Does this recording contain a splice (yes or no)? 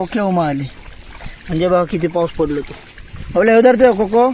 no